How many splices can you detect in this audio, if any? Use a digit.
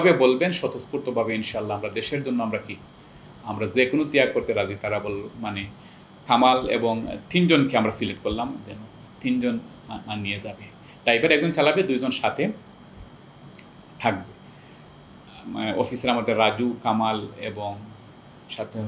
0